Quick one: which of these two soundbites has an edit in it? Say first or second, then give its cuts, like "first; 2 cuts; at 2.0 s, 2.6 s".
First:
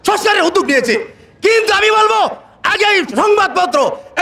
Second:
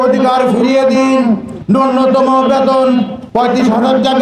second; 2 cuts; at 1.5 s, 3.2 s